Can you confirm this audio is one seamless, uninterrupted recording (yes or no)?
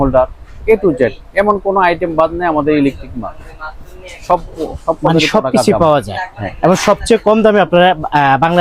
yes